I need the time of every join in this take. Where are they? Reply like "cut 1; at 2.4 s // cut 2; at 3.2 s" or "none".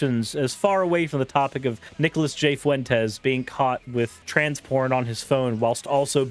cut 1; at 1.9 s // cut 2; at 4.2 s